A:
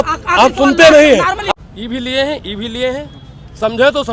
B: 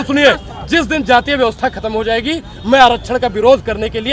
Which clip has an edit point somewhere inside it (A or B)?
A